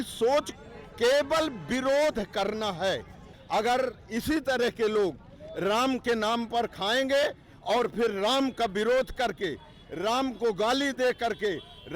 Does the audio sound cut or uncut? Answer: cut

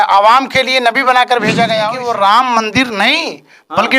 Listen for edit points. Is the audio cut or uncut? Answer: cut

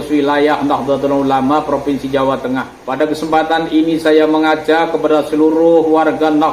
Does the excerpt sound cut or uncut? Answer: cut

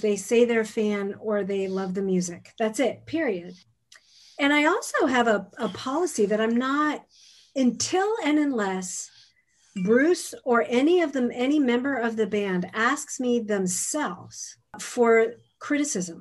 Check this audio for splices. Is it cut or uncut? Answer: cut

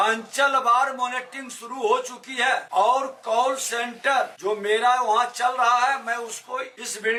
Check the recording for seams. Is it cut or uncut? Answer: uncut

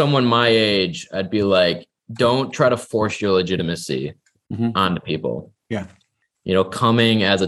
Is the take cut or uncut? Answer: cut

